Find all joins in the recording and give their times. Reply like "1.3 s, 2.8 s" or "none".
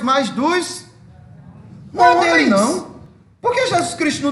2.2 s